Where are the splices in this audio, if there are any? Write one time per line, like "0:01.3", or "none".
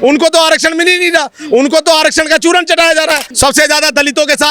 0:03.3